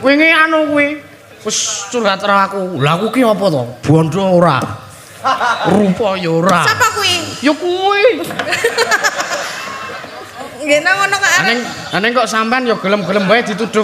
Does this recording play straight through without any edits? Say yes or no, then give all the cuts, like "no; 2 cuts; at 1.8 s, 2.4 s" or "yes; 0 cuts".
yes; 0 cuts